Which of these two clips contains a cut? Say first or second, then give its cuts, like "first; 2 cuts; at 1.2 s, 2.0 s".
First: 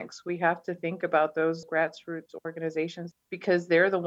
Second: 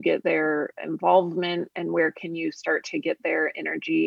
first; 1 cut; at 3.0 s